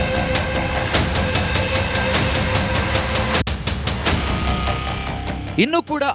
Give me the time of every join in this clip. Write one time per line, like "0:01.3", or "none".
none